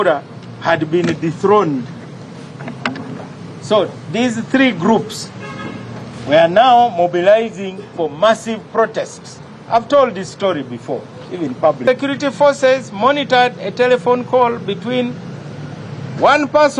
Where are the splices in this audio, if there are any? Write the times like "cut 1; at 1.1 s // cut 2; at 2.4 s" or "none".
cut 1; at 11.8 s